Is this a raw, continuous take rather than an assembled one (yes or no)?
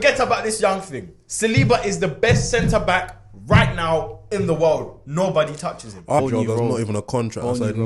no